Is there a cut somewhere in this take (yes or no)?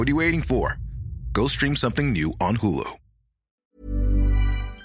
yes